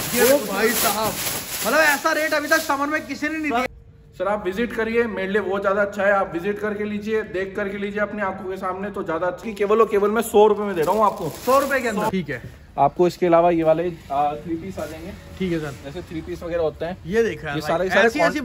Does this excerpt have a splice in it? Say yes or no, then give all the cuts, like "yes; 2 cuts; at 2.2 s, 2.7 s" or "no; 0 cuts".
yes; 3 cuts; at 3.7 s, 9.4 s, 12.1 s